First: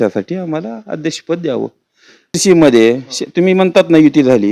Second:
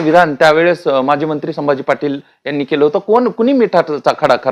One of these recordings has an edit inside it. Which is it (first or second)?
first